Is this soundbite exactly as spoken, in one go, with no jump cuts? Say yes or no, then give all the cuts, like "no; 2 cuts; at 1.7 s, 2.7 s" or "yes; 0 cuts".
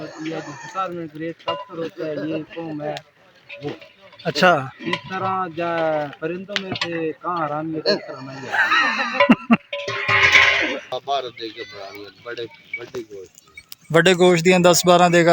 no; 1 cut; at 10.9 s